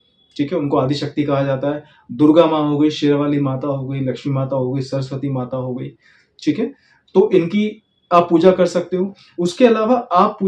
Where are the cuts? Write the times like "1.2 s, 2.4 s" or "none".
none